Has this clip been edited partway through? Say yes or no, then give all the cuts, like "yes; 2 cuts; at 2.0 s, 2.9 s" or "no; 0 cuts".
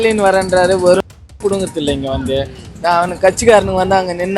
no; 0 cuts